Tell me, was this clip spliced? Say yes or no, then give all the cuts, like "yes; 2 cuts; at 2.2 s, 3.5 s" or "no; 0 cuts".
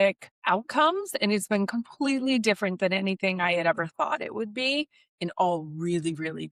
no; 0 cuts